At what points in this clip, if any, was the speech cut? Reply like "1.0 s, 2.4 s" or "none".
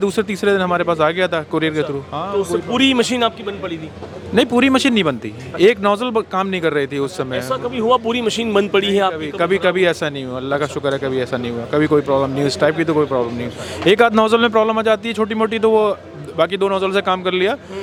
none